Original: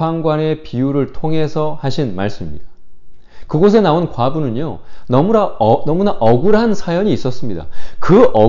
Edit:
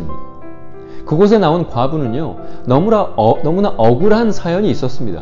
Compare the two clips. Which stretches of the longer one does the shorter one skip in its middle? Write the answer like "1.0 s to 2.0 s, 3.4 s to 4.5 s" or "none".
none